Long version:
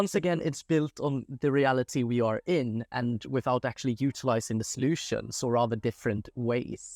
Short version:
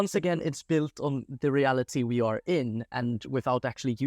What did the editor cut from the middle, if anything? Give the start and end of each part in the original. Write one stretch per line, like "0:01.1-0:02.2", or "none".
none